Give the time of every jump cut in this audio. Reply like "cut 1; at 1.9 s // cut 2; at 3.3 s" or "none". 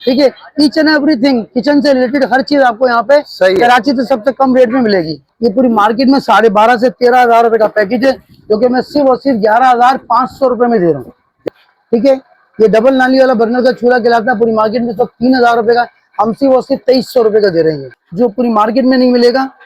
cut 1; at 5.2 s // cut 2; at 11.4 s // cut 3; at 17.8 s